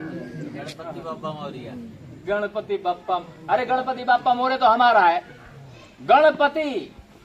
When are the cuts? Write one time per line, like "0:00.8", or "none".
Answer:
none